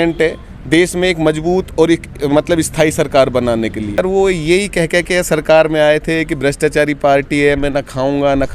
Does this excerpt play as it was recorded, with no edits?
no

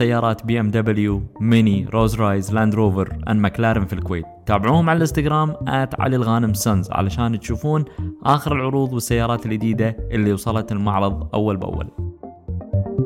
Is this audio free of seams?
no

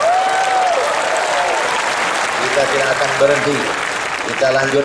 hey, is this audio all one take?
yes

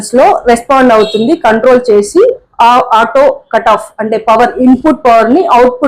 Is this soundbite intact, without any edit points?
yes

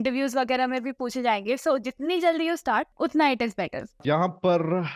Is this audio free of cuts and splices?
no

